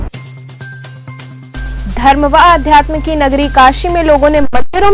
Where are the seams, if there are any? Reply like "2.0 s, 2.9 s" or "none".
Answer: 1.4 s